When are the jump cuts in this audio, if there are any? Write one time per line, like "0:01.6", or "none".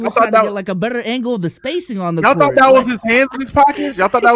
none